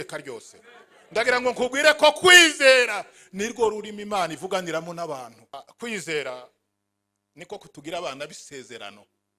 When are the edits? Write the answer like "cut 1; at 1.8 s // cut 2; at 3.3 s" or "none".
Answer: cut 1; at 5.6 s